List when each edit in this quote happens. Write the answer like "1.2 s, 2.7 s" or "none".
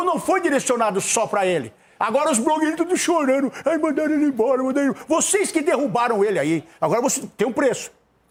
none